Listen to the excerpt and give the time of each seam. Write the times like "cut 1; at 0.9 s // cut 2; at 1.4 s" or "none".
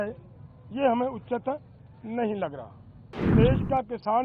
cut 1; at 3.3 s